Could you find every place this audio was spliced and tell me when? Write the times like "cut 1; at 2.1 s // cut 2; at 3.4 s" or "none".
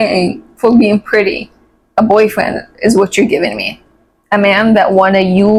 none